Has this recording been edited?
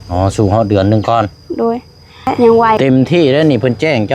yes; 1 cut; at 2.8 s

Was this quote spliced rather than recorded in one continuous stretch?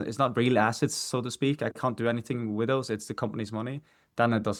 no; 0 cuts

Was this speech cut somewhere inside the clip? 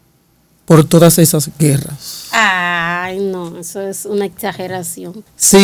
no; 0 cuts

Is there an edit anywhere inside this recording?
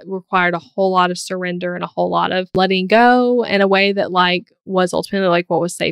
yes; 1 cut; at 2.5 s

